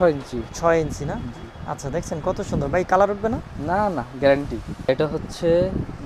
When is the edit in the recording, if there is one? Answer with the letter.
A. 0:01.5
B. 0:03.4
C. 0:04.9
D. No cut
C